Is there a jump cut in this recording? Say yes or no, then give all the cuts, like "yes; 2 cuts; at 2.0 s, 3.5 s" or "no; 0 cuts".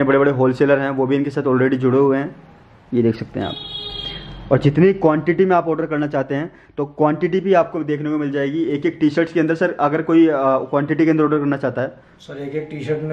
no; 0 cuts